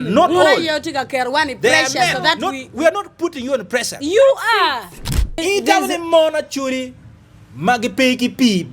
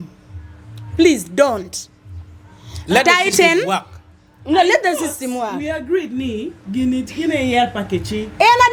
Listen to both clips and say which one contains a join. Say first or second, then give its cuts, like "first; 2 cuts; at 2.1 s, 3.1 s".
first; 1 cut; at 5.4 s